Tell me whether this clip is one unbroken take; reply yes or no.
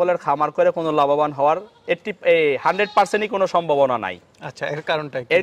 yes